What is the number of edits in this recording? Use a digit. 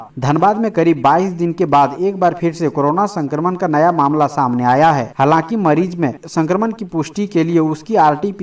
0